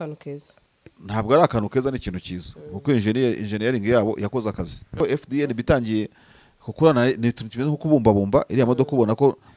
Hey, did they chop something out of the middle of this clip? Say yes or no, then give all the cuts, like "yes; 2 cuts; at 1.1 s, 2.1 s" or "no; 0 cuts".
yes; 1 cut; at 5.0 s